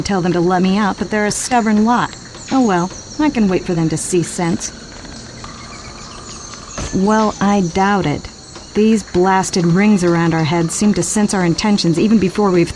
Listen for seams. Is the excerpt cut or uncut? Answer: uncut